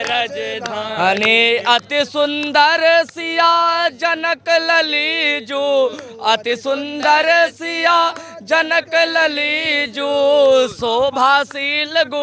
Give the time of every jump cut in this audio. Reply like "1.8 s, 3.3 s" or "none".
none